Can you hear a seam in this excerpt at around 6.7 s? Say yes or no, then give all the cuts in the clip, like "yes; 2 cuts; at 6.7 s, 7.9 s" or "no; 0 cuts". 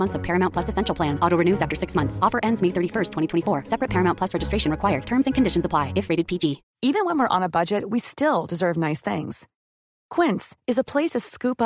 yes; 1 cut; at 6.7 s